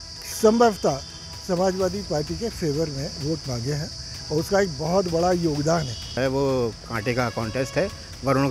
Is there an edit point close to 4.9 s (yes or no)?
no